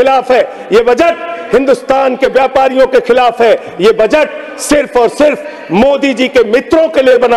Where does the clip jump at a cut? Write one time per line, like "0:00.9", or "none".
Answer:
none